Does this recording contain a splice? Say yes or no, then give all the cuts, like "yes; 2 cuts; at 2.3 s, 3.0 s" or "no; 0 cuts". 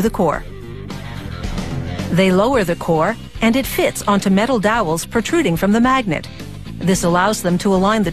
no; 0 cuts